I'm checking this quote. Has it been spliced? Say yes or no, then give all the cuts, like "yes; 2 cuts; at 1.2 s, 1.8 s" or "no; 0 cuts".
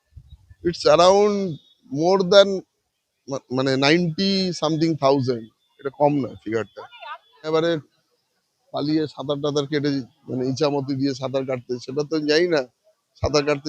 yes; 1 cut; at 7.5 s